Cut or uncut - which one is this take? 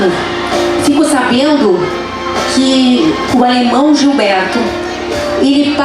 uncut